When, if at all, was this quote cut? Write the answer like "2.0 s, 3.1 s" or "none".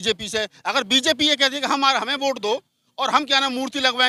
none